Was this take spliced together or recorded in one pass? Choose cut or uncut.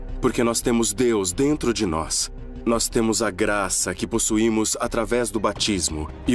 cut